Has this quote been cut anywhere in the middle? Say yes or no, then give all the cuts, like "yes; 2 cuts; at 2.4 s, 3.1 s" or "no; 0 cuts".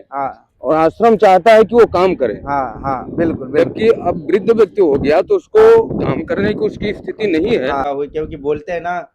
yes; 1 cut; at 7.9 s